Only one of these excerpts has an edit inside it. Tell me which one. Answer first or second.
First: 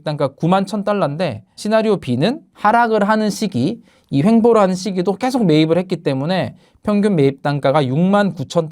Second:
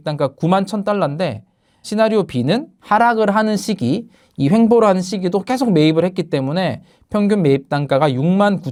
first